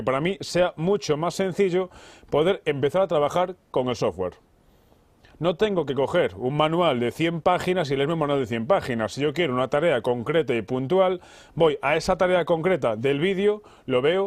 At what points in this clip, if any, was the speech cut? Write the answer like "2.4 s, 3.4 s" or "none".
none